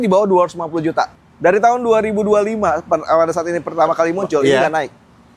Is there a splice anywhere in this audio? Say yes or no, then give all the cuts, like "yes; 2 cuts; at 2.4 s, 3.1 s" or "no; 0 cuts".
yes; 1 cut; at 1.1 s